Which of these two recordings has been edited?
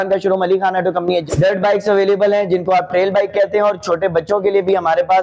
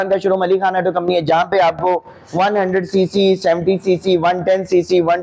first; 1 cut; at 1.2 s

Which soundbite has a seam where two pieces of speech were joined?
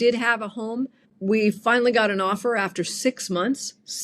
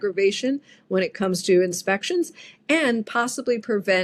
first; 1 cut; at 1.0 s

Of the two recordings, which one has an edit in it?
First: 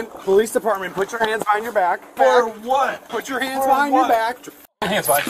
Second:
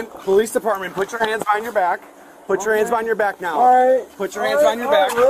first; 1 cut; at 2.1 s

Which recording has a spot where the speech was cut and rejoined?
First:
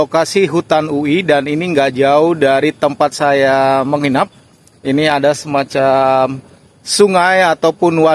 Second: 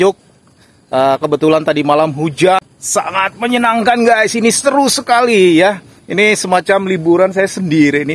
second; 1 cut; at 2.7 s

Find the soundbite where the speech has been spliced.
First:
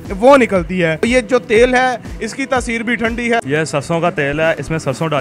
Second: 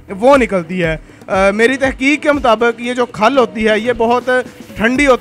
first; 2 cuts; at 1.1 s, 3.4 s

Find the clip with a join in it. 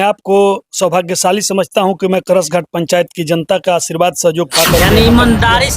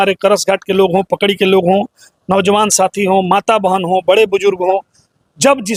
first; 1 cut; at 4.8 s

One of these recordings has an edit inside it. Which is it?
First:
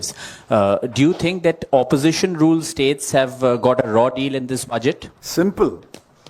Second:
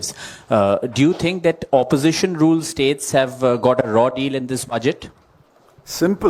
first; 1 cut; at 5.1 s

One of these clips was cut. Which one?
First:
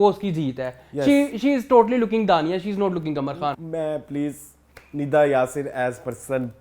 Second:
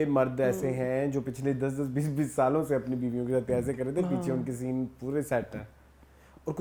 first; 1 cut; at 3.5 s

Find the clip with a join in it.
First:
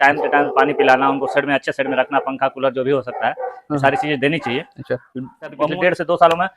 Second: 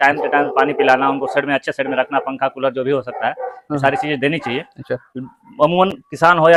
first; 1 cut; at 5.6 s

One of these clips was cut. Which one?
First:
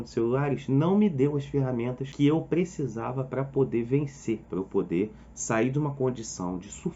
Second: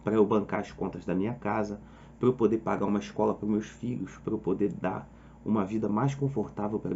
first; 2 cuts; at 2.0 s, 4.4 s

